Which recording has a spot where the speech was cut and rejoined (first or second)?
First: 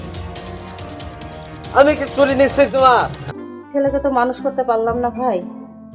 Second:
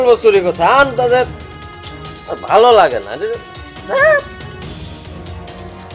first